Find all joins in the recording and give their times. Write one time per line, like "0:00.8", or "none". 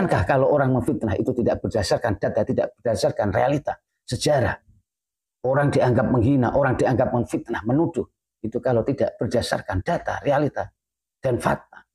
none